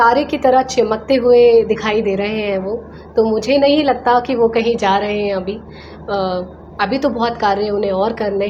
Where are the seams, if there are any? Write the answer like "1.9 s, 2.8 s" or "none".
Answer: none